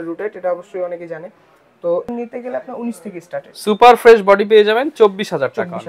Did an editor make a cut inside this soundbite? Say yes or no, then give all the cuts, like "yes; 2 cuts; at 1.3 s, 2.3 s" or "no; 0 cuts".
yes; 1 cut; at 2.1 s